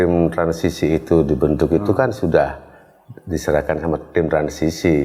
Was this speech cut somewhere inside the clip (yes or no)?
no